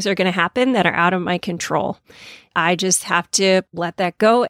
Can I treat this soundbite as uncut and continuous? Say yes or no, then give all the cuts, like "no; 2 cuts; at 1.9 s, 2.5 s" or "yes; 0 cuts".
no; 2 cuts; at 2.5 s, 3.7 s